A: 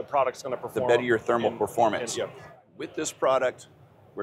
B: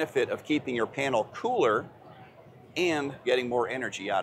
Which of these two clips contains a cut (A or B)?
A